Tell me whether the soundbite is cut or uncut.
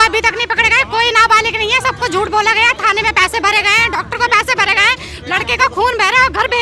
uncut